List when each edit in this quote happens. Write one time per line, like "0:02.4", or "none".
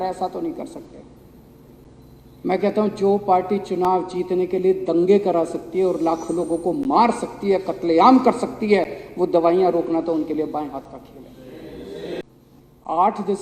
0:12.2